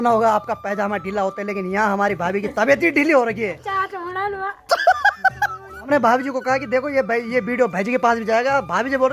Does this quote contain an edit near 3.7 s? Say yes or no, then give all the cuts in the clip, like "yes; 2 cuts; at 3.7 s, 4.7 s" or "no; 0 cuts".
yes; 2 cuts; at 3.7 s, 5.9 s